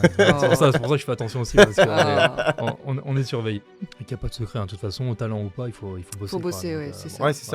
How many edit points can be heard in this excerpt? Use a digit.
1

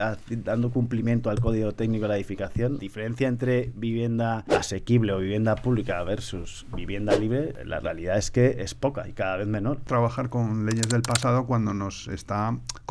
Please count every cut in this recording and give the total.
4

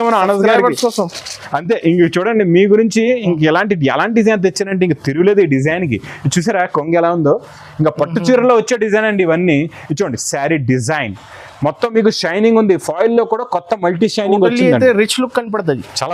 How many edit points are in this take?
0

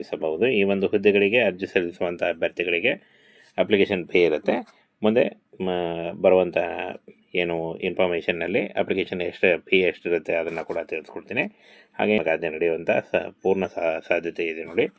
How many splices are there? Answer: 1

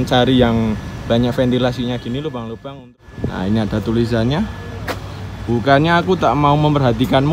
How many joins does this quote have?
1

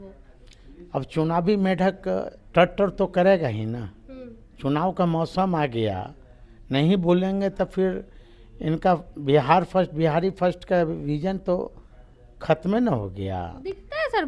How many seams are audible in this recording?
1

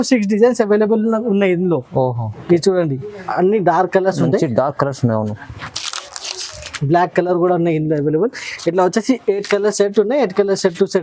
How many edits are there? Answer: 1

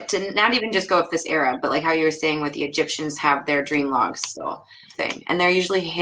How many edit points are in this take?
1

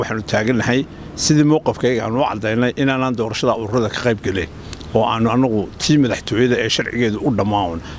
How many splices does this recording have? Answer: 0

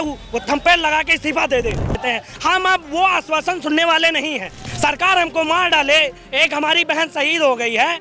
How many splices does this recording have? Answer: 2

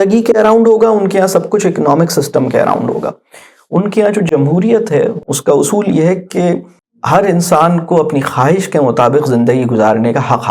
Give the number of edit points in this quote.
2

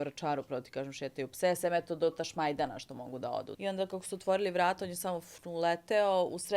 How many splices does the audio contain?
1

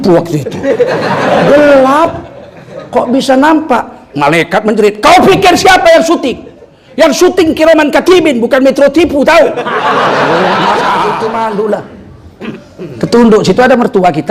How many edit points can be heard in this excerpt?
1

